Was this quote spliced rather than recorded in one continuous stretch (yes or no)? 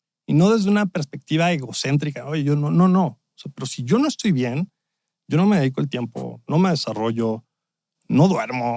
no